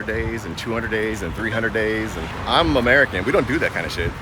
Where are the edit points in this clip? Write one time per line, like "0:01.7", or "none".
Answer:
0:02.3

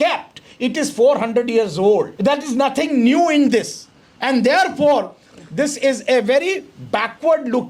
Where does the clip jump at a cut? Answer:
0:02.1

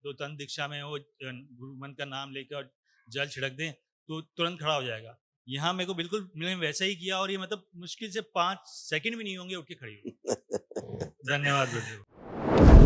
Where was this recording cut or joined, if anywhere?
0:12.0

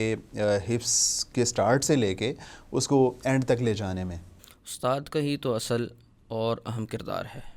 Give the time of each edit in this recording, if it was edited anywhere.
none

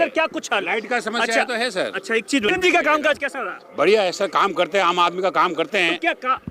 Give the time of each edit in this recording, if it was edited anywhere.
0:02.5

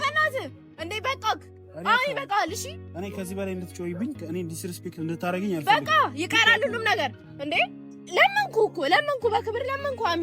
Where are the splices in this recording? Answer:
0:07.9

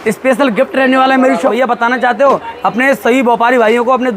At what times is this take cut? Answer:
0:01.5

